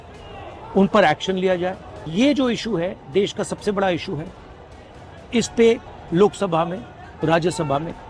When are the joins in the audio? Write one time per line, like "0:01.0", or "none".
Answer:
0:02.0
0:05.9